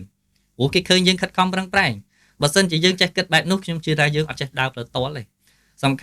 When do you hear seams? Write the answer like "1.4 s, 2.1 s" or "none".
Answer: none